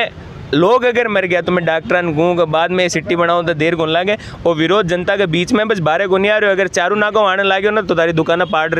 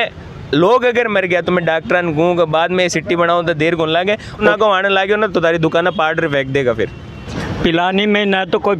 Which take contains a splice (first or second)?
second